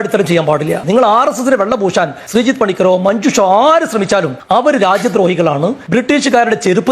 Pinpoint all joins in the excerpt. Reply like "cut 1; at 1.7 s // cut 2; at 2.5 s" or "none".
cut 1; at 2.2 s // cut 2; at 4.4 s // cut 3; at 5.8 s